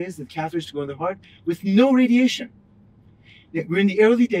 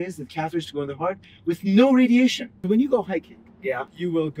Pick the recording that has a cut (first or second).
second